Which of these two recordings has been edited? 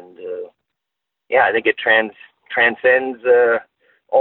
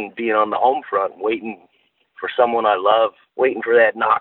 second; 1 cut; at 3.2 s

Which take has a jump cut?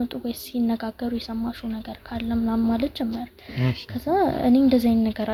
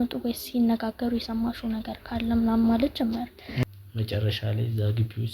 second; 1 cut; at 3.5 s

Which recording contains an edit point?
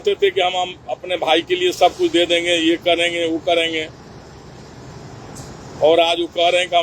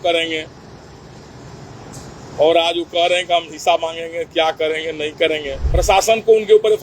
second; 1 cut; at 5.6 s

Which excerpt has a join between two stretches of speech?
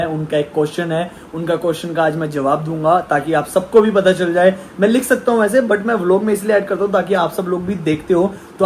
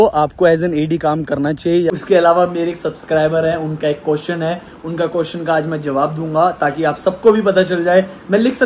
second; 1 cut; at 2.0 s

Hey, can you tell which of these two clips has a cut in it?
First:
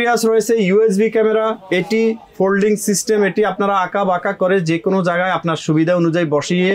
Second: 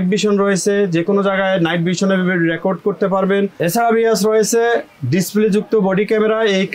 second; 1 cut; at 3.5 s

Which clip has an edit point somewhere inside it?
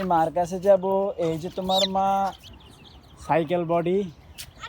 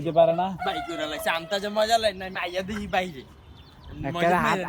first; 1 cut; at 2.5 s

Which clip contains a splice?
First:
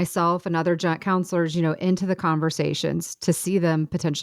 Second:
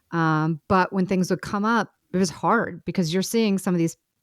second; 1 cut; at 2.0 s

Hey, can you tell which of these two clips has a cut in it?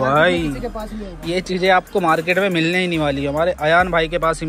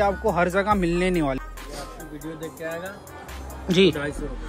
second; 1 cut; at 1.4 s

